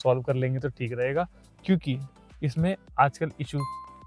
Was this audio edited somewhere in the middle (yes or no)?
no